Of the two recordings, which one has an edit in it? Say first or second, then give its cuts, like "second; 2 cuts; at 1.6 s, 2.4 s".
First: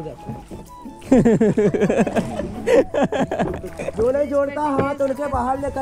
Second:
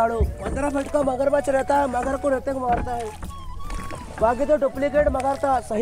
first; 1 cut; at 3.8 s